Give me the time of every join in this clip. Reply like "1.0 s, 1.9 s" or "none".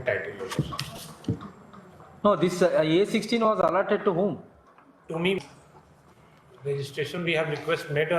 5.4 s